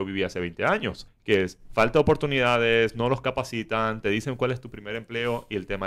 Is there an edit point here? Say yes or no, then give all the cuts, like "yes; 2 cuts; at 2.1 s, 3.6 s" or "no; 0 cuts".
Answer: yes; 1 cut; at 1.1 s